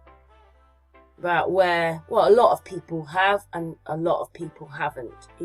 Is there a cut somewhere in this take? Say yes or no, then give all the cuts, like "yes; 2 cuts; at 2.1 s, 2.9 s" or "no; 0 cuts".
no; 0 cuts